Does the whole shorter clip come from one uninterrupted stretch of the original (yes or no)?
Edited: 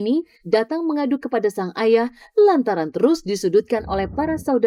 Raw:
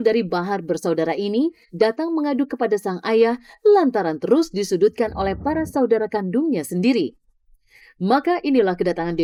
yes